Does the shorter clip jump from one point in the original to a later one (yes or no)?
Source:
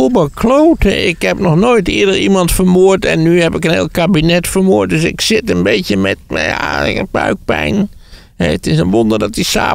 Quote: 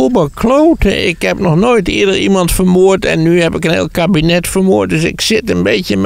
no